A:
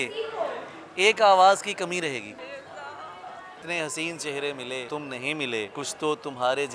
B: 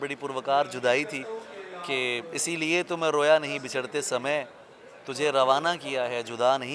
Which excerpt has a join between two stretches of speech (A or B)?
A